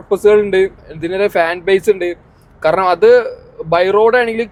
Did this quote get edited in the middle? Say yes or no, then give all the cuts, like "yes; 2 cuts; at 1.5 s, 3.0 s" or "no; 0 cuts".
no; 0 cuts